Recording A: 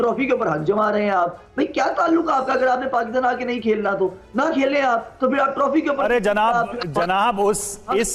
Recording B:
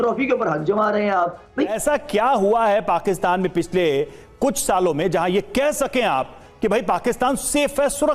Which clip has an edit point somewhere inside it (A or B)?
B